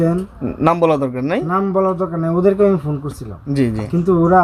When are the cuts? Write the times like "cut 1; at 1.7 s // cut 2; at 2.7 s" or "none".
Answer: none